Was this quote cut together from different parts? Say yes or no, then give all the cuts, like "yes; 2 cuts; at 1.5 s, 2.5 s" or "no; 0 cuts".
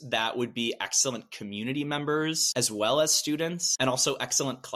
yes; 2 cuts; at 2.4 s, 3.7 s